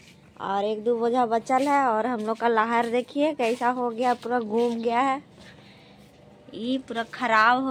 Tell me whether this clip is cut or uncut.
uncut